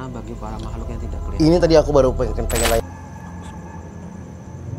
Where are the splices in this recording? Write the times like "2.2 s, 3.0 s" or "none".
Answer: 2.8 s